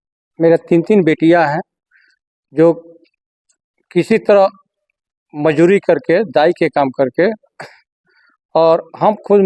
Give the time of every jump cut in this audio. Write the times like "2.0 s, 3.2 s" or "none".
none